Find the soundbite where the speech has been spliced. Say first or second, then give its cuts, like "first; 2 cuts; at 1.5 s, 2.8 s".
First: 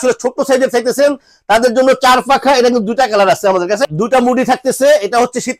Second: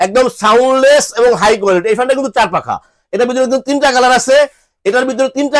first; 1 cut; at 3.8 s